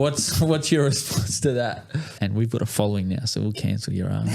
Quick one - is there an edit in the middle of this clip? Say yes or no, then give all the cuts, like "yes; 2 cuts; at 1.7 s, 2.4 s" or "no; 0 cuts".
yes; 1 cut; at 2.1 s